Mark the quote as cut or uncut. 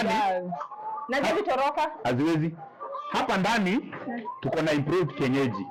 uncut